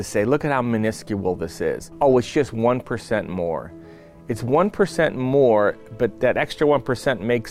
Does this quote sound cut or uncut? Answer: cut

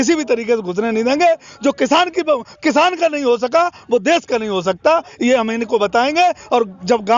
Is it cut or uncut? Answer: uncut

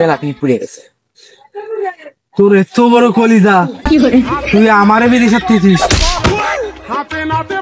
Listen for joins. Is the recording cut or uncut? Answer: uncut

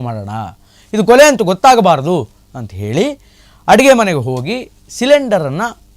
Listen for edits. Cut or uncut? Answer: uncut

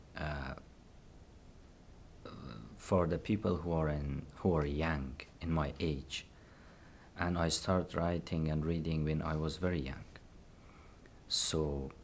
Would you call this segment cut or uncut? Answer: cut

